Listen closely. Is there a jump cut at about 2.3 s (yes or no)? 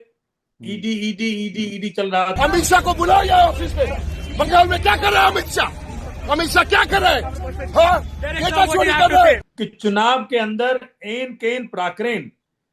yes